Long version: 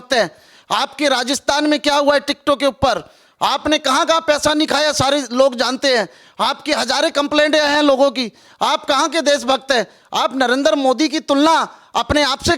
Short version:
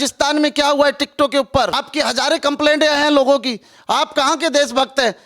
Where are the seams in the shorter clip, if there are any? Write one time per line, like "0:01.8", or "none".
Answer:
0:01.8

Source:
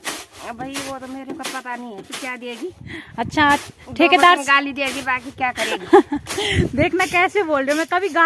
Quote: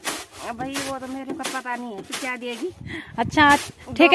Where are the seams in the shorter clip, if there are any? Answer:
none

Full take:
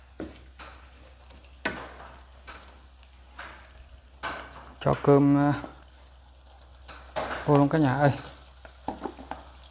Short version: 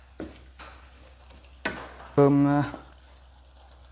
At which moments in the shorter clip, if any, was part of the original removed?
0:02.2

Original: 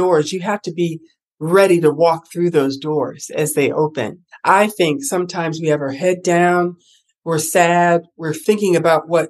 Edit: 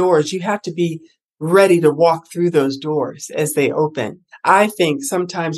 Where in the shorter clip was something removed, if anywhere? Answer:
none

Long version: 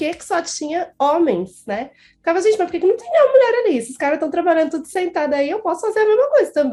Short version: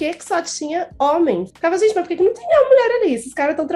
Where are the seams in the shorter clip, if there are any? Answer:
0:01.5

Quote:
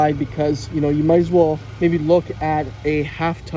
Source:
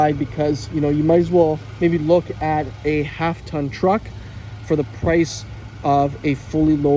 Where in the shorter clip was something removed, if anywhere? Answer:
none

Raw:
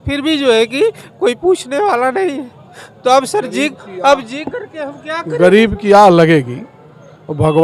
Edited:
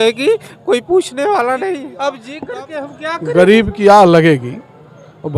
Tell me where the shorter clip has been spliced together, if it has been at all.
0:02.3

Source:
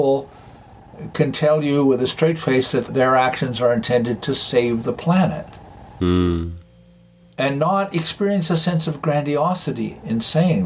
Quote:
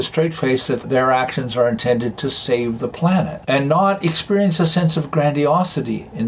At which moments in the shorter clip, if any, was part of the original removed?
0:03.4

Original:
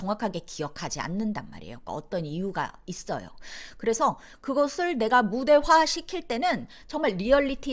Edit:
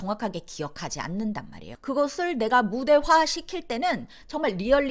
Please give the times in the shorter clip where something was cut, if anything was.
0:01.7

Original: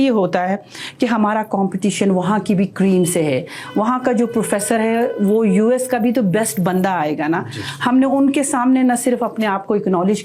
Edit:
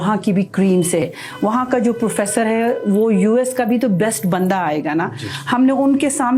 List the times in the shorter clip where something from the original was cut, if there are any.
0:01.0

